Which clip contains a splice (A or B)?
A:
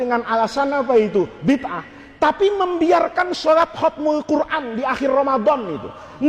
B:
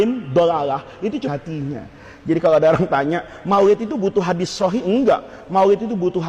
B